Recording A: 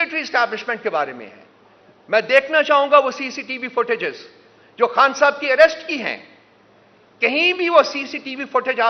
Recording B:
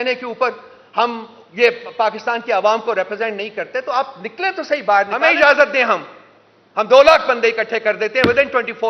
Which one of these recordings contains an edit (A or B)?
B